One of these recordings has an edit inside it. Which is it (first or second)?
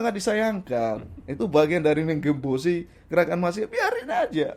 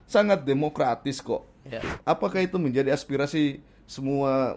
second